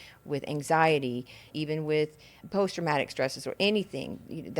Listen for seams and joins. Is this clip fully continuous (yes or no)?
no